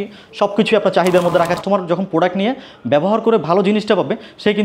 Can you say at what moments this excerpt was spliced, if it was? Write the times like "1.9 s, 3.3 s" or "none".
1.6 s